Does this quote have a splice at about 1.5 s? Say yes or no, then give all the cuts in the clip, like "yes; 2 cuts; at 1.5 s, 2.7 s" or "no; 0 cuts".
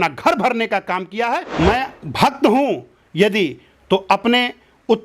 yes; 1 cut; at 1.5 s